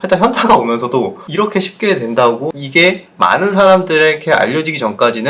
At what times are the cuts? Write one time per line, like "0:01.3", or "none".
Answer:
0:02.5